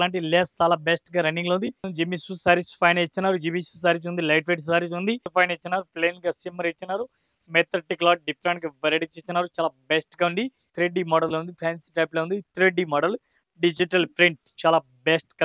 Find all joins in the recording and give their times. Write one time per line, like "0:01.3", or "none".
0:01.8
0:05.3
0:10.6